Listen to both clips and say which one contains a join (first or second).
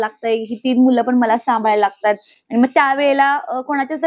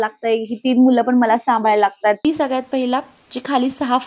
second